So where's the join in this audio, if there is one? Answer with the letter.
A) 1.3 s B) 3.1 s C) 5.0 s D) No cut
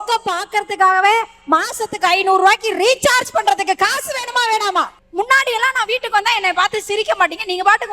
C